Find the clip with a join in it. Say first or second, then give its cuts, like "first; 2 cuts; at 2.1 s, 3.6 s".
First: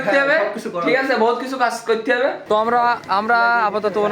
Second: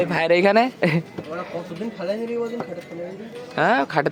first; 1 cut; at 2.4 s